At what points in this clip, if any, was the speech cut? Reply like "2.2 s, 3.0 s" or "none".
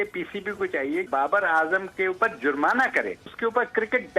1.1 s, 3.3 s

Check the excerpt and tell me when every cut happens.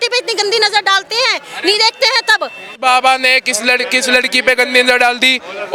none

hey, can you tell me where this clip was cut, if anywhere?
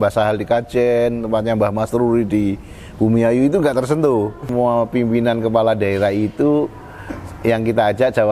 4.5 s

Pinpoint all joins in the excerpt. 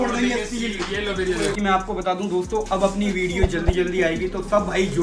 1.6 s

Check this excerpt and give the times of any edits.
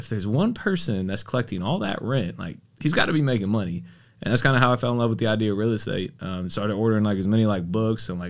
none

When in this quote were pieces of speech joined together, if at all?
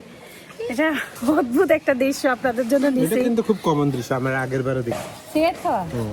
none

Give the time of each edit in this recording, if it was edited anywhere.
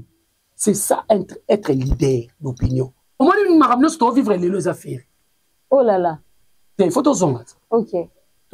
3.0 s

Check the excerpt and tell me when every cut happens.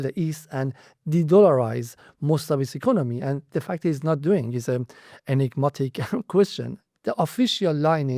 6.8 s

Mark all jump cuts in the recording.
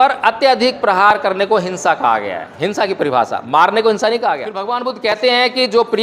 4.6 s

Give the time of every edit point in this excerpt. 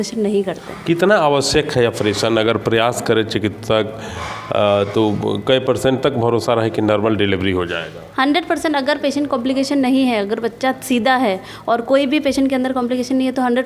none

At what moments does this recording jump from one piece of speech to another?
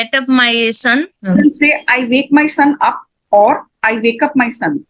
1.2 s

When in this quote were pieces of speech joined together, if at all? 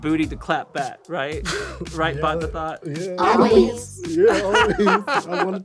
1.0 s

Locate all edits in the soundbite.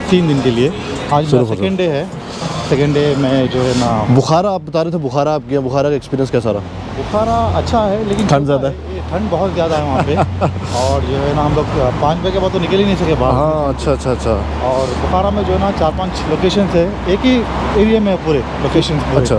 none

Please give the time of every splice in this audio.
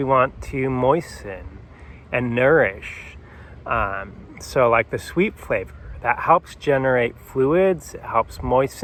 none

